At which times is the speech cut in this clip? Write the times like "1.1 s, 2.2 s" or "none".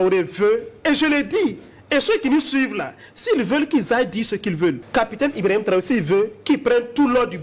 none